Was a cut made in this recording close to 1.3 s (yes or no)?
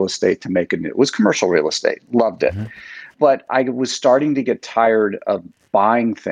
no